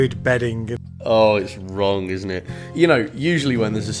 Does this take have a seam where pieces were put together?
yes; 2 cuts; at 0.9 s, 2.6 s

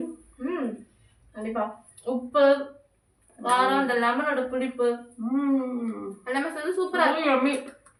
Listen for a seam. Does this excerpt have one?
no; 0 cuts

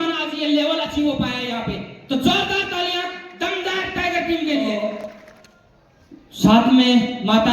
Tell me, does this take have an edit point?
yes; 1 cut; at 4.9 s

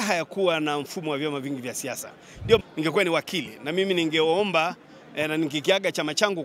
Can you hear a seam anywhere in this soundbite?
yes; 1 cut; at 2.6 s

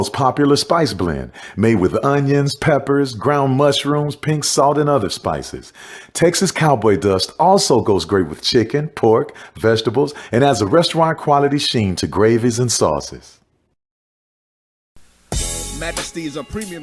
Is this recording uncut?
yes; 0 cuts

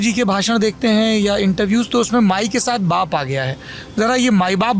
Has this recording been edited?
no; 0 cuts

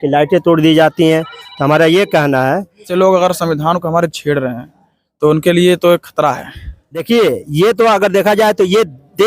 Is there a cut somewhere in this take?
yes; 2 cuts; at 2.9 s, 7.0 s

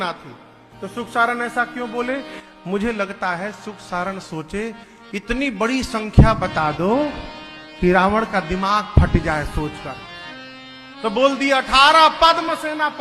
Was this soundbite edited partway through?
no; 0 cuts

